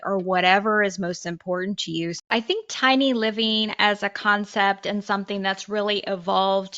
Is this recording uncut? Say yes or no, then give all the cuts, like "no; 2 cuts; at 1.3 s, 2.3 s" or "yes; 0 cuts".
no; 1 cut; at 2.3 s